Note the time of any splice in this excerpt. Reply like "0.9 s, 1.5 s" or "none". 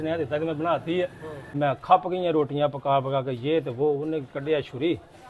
1.5 s